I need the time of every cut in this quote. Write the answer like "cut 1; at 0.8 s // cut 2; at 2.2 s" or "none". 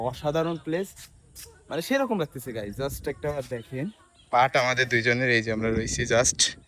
none